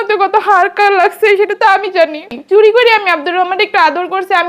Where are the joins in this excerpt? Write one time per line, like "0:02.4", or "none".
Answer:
0:02.3

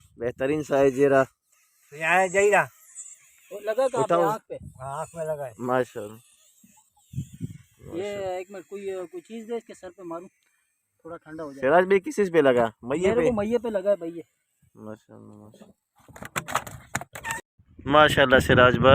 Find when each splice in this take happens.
0:17.4

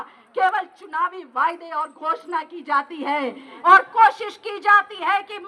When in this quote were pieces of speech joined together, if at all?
0:03.5

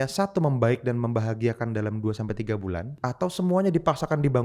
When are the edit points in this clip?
0:02.9

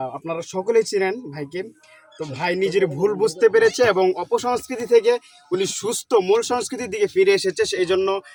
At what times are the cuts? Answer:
none

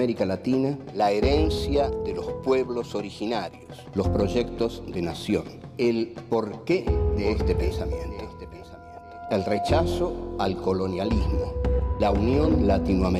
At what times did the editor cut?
none

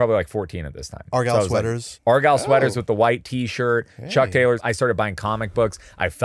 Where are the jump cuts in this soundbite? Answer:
0:01.9
0:04.6

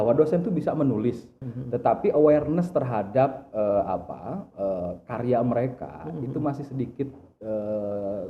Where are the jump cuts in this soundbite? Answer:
0:01.3

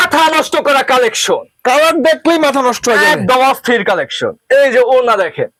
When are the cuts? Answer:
none

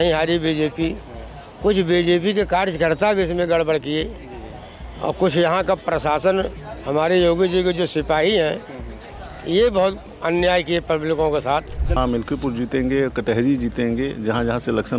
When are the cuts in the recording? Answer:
0:12.0

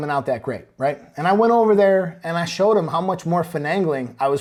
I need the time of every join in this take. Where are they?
none

